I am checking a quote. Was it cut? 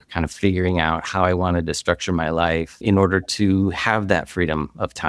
yes; 1 cut; at 2.8 s

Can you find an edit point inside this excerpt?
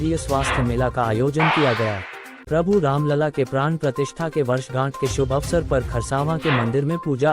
yes; 1 cut; at 2.5 s

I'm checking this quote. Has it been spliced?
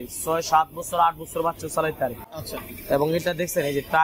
no; 0 cuts

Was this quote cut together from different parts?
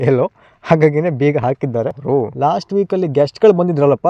yes; 1 cut; at 2.0 s

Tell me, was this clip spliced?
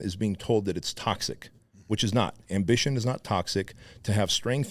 no; 0 cuts

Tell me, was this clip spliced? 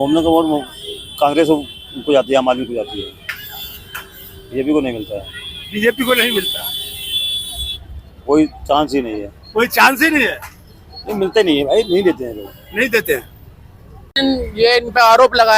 yes; 1 cut; at 14.1 s

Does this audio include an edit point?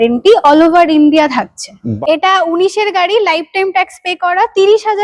yes; 1 cut; at 1.9 s

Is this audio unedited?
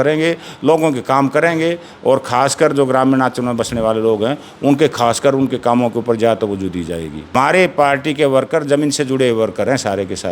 no; 1 cut; at 7.3 s

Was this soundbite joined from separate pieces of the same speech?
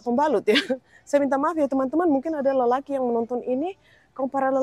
no; 0 cuts

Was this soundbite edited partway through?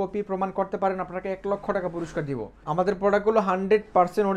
yes; 1 cut; at 2.6 s

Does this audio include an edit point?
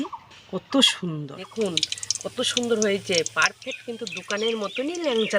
yes; 1 cut; at 1.4 s

